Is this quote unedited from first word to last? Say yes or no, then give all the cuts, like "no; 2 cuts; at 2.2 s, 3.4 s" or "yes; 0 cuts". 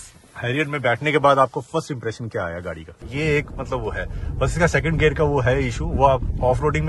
no; 1 cut; at 3.0 s